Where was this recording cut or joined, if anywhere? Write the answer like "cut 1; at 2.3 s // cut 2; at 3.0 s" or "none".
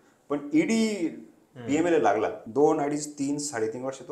cut 1; at 2.4 s